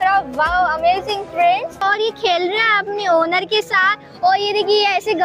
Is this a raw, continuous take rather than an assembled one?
no; 1 cut; at 1.8 s

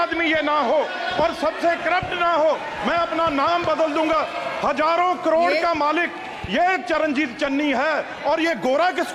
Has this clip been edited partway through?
no; 0 cuts

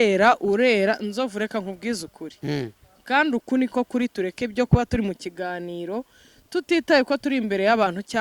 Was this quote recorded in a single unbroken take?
yes; 0 cuts

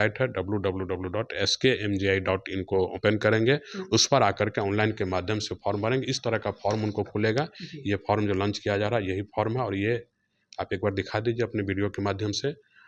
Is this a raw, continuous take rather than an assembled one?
yes; 0 cuts

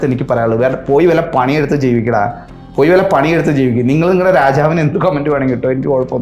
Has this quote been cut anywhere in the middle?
no; 0 cuts

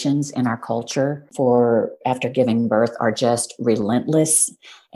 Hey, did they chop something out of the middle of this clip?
yes; 1 cut; at 1.2 s

